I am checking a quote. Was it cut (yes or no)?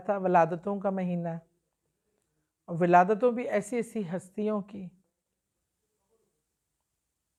no